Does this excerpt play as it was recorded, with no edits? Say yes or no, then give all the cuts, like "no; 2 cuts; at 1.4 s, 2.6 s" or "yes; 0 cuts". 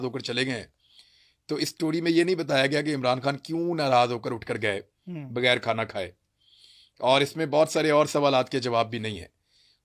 yes; 0 cuts